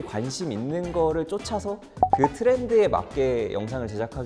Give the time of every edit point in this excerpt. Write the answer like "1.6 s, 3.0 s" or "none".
none